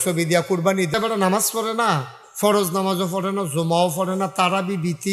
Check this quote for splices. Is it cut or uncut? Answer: cut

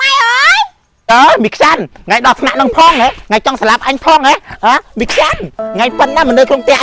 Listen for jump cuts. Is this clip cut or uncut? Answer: cut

